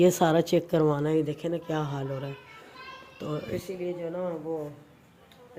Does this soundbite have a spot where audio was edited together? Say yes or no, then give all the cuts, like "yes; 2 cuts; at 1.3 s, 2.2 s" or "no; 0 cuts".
no; 0 cuts